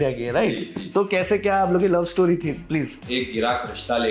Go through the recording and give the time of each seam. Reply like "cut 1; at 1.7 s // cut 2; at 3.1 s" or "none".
cut 1; at 3.0 s